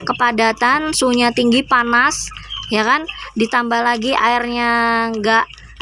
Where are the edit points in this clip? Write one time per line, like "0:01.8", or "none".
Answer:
none